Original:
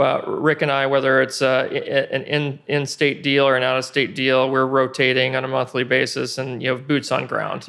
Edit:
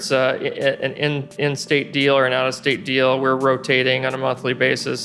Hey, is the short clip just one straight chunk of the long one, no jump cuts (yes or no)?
yes